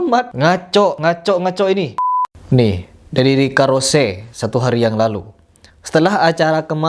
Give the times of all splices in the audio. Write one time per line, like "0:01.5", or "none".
0:02.0